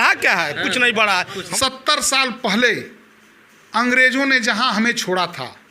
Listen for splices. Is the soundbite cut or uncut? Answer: cut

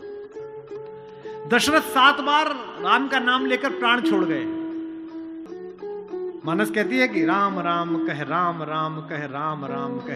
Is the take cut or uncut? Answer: cut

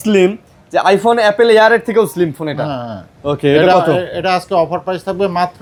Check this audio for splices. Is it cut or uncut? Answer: uncut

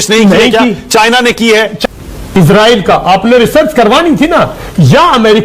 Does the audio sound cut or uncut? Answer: cut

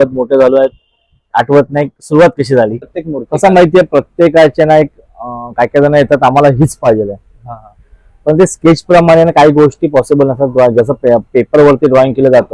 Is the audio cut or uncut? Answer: cut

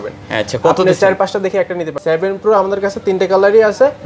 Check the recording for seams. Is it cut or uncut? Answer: cut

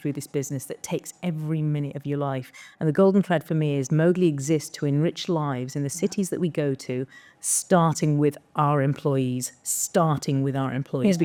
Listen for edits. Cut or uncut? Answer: uncut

